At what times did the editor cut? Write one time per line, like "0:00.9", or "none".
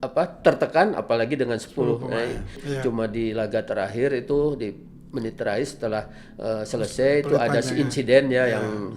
0:02.6